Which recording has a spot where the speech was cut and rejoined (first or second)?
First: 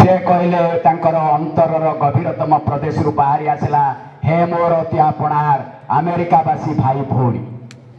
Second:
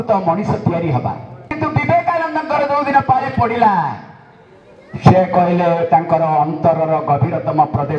second